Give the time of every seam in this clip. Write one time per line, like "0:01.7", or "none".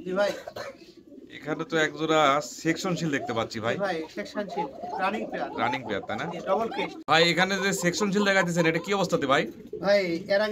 0:07.0

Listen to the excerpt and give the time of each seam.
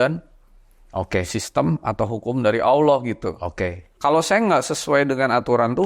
0:03.8

